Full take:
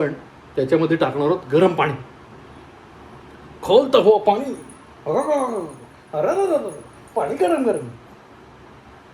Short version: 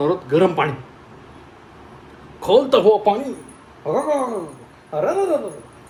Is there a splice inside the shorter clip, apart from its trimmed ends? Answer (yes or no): no